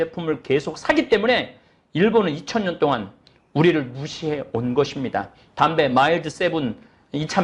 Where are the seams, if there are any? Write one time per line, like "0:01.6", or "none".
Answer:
none

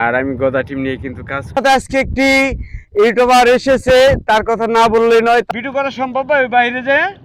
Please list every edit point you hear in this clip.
0:01.5
0:05.5

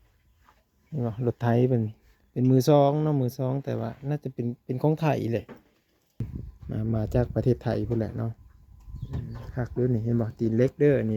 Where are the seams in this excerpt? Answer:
0:06.3

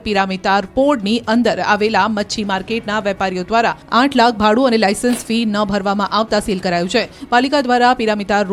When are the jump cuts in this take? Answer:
0:03.3

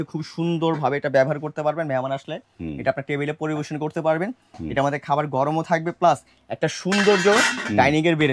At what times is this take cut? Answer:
none

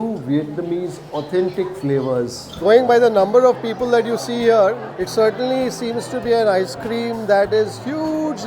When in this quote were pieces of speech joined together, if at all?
0:02.4

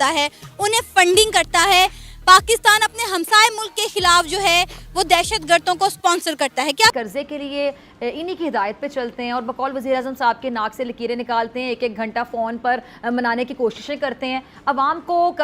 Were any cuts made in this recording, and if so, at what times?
0:06.9

